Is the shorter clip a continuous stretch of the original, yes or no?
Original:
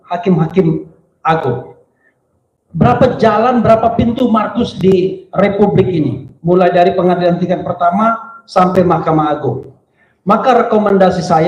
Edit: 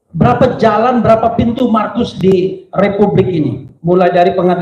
yes